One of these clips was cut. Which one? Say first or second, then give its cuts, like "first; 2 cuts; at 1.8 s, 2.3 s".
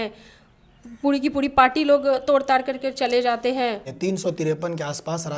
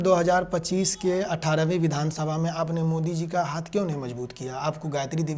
first; 1 cut; at 3.9 s